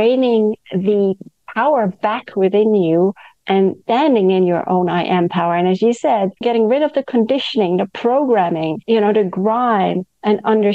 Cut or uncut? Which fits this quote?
cut